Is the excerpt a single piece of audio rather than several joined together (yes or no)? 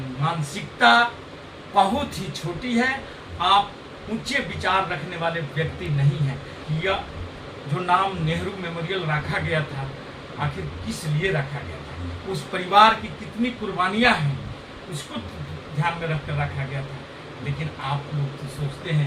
no